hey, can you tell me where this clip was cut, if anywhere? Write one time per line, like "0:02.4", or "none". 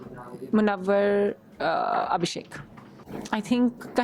0:03.1